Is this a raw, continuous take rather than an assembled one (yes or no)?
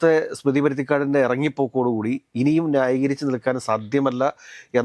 yes